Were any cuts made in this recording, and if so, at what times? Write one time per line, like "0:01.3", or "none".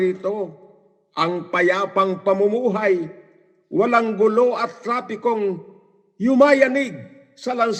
none